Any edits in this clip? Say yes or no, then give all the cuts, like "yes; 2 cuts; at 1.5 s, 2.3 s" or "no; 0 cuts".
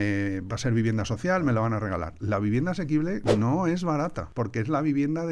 yes; 1 cut; at 4.2 s